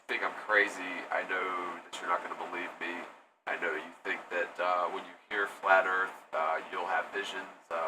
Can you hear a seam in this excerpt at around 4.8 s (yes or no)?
yes